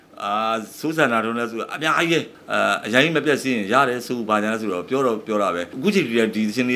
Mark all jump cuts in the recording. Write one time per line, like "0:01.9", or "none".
0:02.4
0:05.7